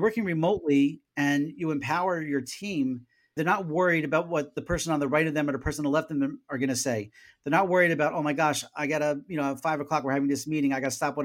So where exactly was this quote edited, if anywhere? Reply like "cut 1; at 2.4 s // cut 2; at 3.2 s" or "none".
cut 1; at 3.4 s // cut 2; at 4.6 s